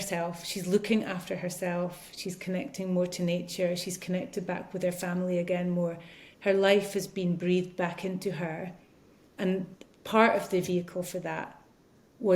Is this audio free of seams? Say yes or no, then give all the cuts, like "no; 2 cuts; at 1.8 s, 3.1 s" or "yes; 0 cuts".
yes; 0 cuts